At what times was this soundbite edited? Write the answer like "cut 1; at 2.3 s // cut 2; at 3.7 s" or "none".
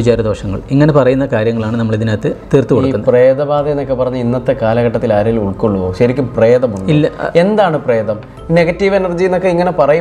none